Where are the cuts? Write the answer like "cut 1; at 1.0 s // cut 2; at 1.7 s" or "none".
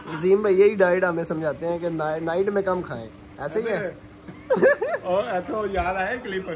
none